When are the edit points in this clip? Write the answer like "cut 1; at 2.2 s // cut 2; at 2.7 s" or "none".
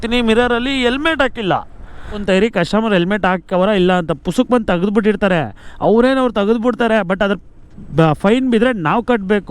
cut 1; at 2.2 s